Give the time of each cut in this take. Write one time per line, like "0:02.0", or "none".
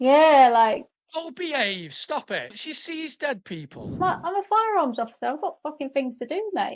0:01.0
0:02.6
0:04.0